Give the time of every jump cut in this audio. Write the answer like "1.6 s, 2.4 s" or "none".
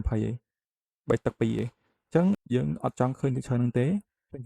2.4 s